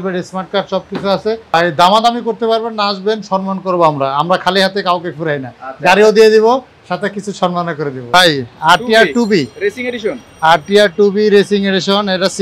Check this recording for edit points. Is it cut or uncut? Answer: cut